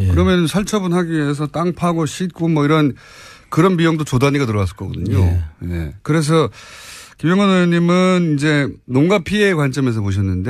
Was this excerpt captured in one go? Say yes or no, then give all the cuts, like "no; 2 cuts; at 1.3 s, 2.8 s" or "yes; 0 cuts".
no; 1 cut; at 6.7 s